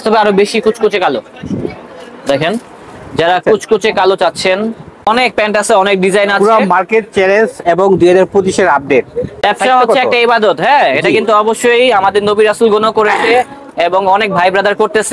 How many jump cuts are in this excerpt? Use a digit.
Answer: 2